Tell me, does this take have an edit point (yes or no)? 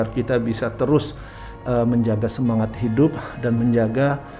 no